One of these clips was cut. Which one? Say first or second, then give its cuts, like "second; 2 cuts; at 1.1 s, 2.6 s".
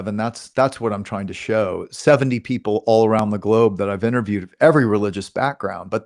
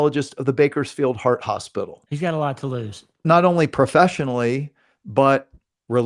second; 2 cuts; at 2.0 s, 3.2 s